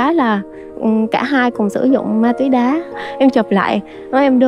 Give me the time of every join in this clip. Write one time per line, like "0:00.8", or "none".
0:03.0

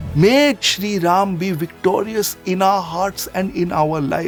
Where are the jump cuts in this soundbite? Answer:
none

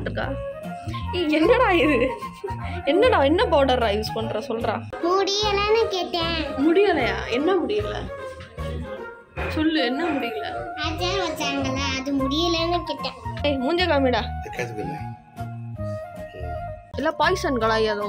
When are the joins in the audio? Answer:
0:04.9
0:16.9

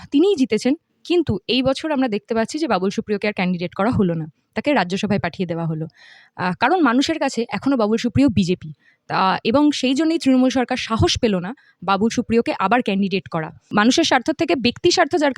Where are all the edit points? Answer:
0:13.7

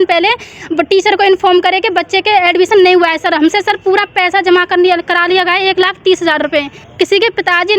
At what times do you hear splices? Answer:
0:06.8

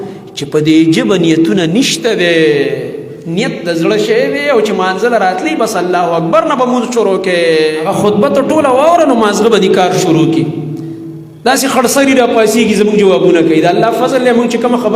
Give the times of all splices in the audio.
0:07.9

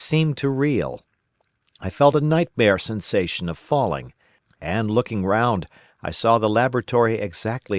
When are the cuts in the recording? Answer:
none

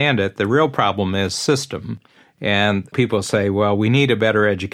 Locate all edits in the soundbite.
none

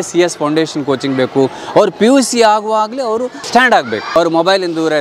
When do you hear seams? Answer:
0:03.4
0:04.1

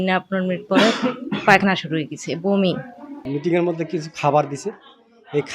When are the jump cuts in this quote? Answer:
0:03.2

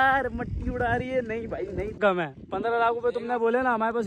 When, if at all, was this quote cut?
0:02.0

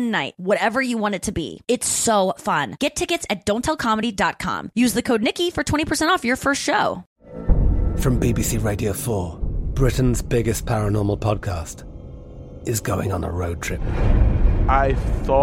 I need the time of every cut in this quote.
0:07.1

